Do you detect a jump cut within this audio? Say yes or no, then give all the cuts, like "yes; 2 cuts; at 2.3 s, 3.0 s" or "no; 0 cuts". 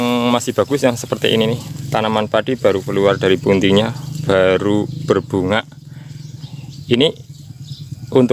no; 0 cuts